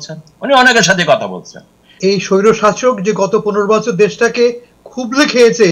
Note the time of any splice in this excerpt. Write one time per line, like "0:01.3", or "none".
0:02.0